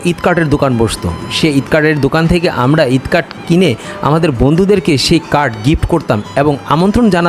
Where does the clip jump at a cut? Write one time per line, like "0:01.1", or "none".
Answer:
none